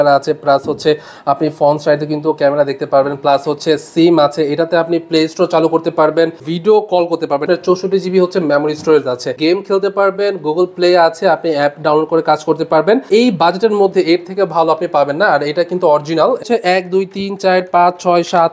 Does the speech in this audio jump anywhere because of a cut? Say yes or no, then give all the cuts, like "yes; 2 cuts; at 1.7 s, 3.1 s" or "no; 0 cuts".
yes; 5 cuts; at 6.5 s, 7.4 s, 9.3 s, 13.1 s, 16.4 s